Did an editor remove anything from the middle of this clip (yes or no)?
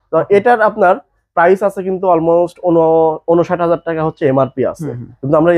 no